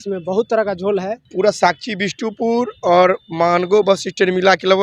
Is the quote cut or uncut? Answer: cut